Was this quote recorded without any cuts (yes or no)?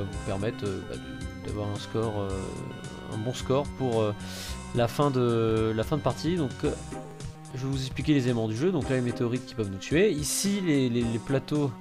yes